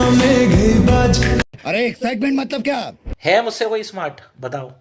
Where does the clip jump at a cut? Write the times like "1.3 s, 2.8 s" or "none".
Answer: 3.1 s